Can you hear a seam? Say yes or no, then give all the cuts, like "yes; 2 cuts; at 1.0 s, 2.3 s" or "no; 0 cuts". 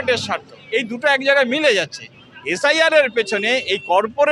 no; 0 cuts